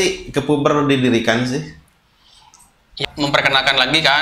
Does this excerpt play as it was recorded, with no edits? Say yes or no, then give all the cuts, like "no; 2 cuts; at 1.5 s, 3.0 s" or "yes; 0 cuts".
no; 1 cut; at 3.0 s